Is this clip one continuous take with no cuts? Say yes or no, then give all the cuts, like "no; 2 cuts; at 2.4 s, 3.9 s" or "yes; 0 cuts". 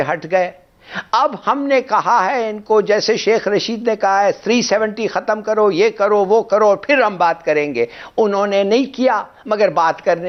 yes; 0 cuts